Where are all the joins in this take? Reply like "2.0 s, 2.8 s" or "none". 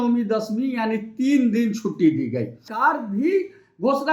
2.7 s